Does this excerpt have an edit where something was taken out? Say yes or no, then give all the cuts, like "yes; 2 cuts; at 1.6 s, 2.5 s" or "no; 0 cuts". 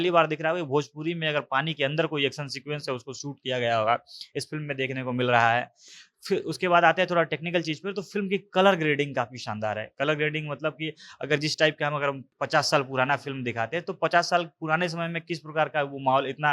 no; 0 cuts